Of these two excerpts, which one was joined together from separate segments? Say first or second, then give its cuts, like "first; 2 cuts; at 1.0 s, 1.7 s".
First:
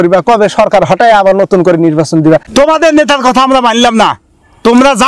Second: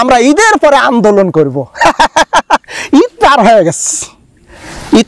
first; 1 cut; at 2.5 s